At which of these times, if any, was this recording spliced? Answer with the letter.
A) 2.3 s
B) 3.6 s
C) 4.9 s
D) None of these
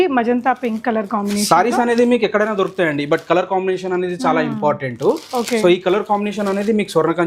D